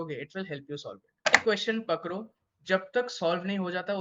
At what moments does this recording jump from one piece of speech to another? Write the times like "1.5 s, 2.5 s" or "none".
1.4 s